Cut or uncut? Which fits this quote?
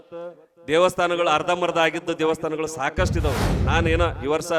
cut